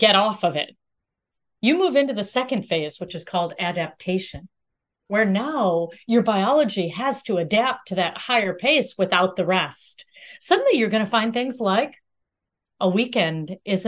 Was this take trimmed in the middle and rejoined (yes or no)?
no